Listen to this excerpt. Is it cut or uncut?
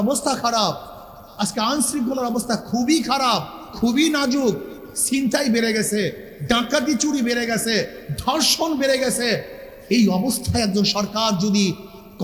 uncut